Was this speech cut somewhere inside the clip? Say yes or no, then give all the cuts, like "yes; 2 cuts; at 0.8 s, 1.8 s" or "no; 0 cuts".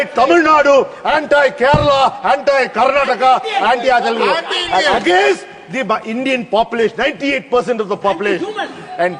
no; 0 cuts